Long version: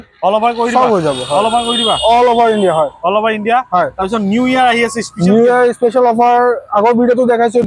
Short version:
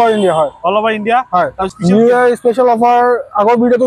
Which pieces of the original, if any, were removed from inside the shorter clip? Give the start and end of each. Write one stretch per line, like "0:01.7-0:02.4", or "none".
0:04.1-0:05.1